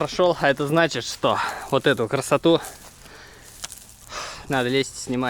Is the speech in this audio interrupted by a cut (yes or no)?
no